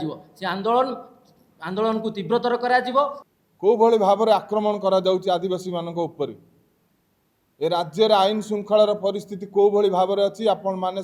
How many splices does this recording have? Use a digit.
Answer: 1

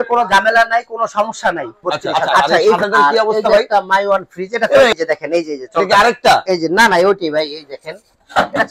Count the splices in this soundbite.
2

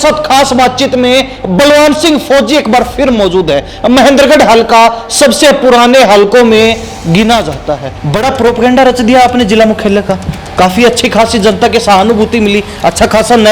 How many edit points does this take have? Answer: 1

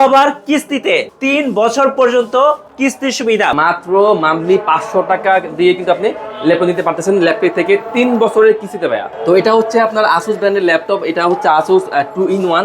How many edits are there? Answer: 3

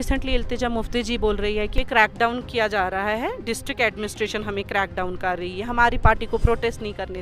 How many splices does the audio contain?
1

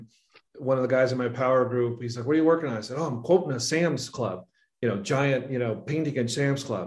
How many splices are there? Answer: 0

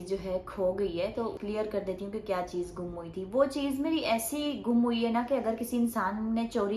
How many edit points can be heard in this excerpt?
1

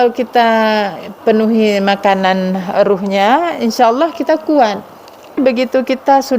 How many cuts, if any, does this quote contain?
1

